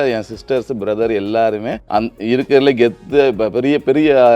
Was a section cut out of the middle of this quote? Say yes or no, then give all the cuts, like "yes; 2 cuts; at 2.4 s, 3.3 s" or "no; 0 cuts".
yes; 1 cut; at 1.8 s